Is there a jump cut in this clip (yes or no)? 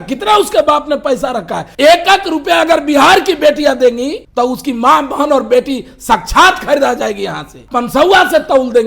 yes